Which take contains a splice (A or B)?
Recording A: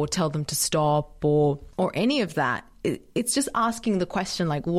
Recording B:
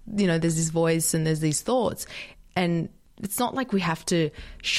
A